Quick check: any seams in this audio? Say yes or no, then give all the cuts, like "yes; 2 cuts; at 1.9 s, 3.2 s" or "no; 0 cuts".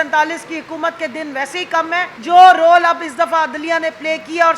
yes; 1 cut; at 2.1 s